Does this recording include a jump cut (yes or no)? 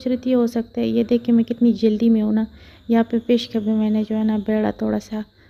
no